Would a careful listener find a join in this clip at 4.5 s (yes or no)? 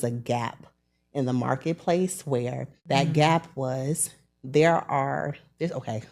no